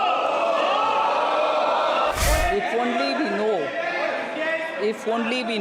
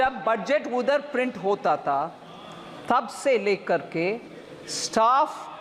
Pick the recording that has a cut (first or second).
first